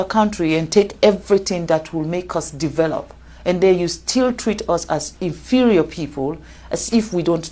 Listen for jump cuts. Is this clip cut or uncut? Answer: uncut